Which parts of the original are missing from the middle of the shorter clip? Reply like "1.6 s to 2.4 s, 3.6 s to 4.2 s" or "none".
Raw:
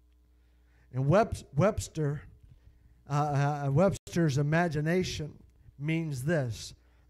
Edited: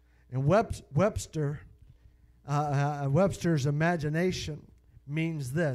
4.0 s to 4.1 s